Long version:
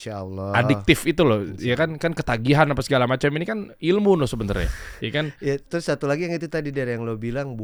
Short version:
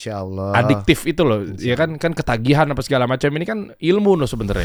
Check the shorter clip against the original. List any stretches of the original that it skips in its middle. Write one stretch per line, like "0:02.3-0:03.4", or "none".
none